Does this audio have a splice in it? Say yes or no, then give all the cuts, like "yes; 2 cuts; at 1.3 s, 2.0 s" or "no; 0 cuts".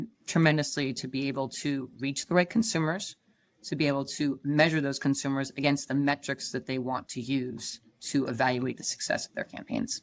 no; 0 cuts